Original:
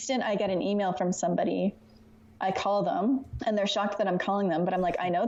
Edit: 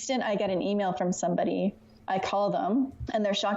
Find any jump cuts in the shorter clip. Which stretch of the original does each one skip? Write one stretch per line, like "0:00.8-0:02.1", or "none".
0:01.9-0:02.2